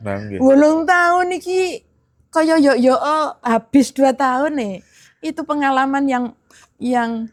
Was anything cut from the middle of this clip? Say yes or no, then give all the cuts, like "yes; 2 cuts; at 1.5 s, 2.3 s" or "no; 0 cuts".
no; 0 cuts